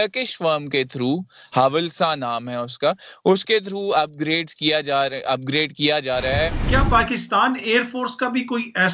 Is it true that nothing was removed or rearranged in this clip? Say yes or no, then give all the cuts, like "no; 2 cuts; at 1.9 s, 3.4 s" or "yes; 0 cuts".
no; 1 cut; at 6.5 s